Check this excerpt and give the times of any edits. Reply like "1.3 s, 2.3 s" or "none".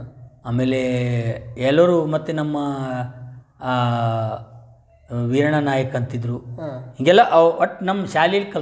none